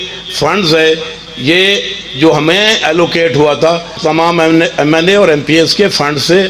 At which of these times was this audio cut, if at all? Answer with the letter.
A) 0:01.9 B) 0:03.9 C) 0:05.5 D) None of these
B